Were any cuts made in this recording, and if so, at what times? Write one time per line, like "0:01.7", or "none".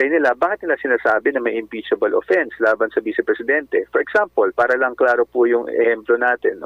none